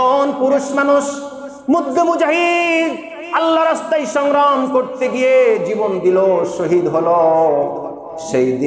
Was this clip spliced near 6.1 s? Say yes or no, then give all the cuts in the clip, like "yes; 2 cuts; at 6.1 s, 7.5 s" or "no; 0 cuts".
no; 0 cuts